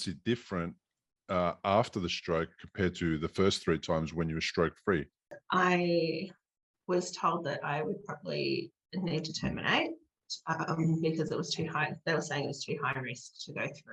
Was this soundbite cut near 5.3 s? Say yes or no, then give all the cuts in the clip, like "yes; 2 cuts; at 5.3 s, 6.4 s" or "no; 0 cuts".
yes; 1 cut; at 5.3 s